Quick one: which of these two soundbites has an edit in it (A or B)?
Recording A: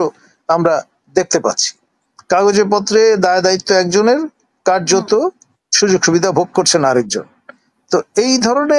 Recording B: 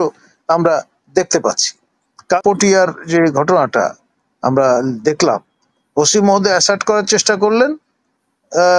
B